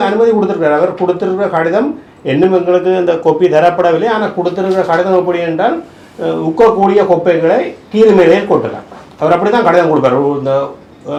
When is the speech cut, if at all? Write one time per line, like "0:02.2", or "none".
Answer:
none